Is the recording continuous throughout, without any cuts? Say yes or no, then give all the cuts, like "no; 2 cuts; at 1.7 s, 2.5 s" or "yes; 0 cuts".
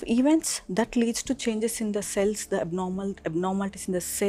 yes; 0 cuts